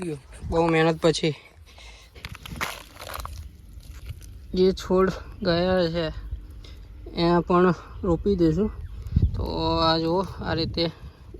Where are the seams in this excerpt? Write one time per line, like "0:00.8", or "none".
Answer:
0:02.1